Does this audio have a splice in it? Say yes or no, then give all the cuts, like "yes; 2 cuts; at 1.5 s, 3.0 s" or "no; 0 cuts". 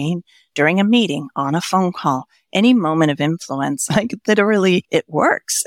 yes; 2 cuts; at 3.8 s, 4.9 s